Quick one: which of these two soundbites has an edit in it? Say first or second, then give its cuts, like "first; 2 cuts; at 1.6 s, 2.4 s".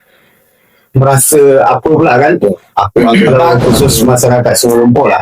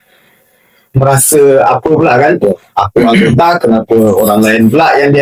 first; 1 cut; at 3.3 s